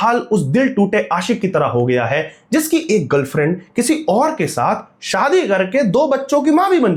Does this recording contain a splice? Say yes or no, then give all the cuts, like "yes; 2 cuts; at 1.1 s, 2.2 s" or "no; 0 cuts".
no; 0 cuts